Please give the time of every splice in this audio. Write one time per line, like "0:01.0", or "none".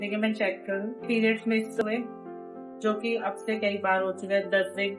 0:01.0

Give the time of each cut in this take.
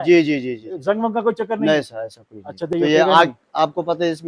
0:02.7

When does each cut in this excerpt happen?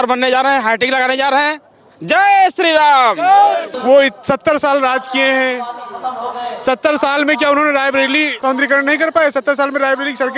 0:03.7
0:08.4

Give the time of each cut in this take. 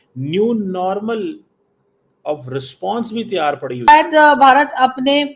0:03.9

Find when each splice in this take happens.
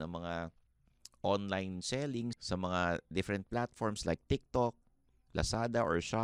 0:02.3

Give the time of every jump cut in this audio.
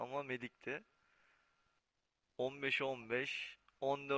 none

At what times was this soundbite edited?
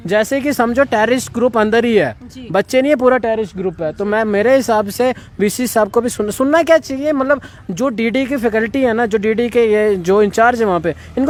none

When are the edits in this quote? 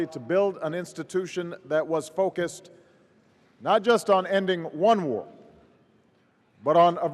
0:05.1

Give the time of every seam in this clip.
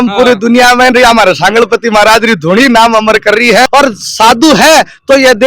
0:03.7

